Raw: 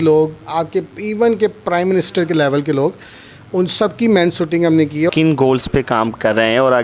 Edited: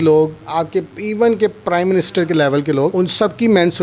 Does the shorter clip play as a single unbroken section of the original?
no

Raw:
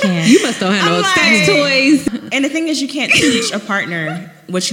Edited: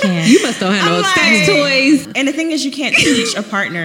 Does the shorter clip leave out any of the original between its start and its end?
yes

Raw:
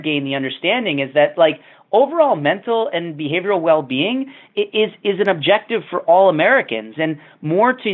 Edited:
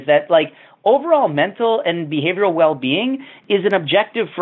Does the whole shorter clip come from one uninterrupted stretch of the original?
no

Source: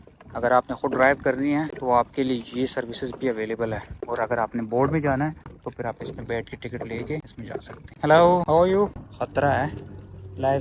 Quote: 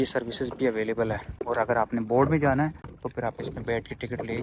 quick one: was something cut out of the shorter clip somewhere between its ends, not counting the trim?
no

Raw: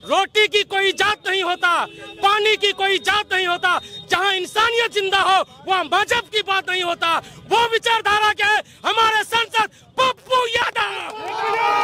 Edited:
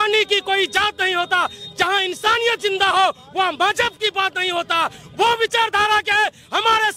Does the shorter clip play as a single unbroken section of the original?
yes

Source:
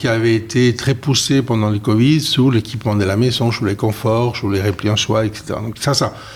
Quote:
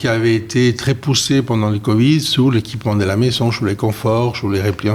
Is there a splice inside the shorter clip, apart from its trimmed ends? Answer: no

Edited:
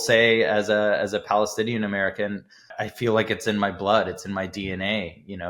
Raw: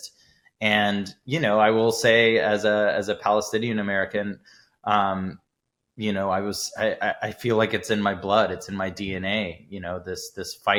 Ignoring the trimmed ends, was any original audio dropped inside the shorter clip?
yes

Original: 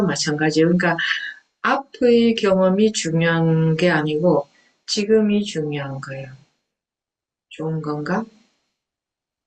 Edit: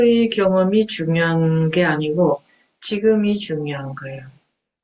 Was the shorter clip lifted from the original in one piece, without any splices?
yes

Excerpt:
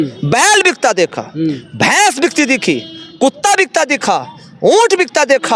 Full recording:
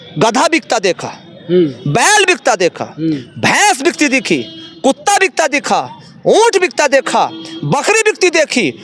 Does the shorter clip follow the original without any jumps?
yes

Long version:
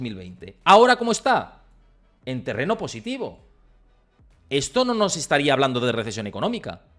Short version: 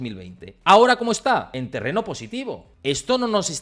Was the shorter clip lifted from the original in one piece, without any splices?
no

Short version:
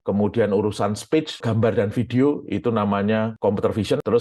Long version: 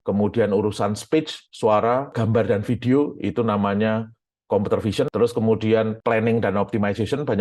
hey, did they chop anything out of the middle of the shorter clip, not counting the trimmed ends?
yes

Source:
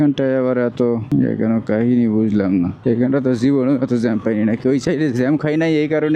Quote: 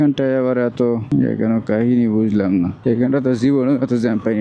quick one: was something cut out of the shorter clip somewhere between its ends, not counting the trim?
no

